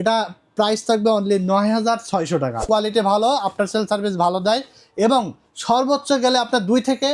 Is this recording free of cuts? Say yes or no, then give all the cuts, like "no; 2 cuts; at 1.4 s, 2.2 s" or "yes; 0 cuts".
no; 1 cut; at 2.6 s